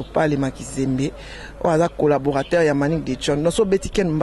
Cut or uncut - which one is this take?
uncut